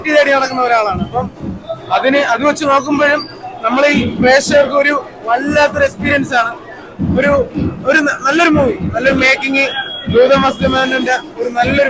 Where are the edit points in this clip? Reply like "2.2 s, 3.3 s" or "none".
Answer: none